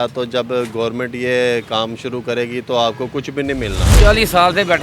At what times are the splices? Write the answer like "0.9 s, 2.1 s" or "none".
3.8 s